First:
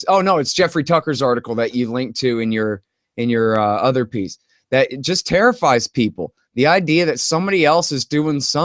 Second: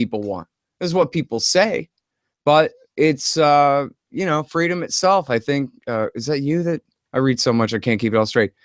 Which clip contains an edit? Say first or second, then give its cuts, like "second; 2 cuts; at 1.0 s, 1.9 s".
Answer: second; 1 cut; at 6.9 s